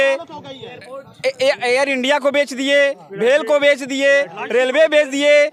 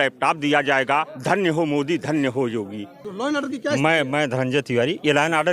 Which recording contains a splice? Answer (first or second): second